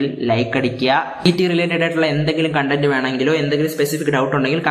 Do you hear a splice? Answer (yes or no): yes